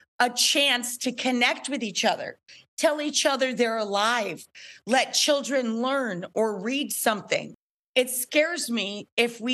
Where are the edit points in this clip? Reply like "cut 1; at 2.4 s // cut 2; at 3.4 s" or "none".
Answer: cut 1; at 7.5 s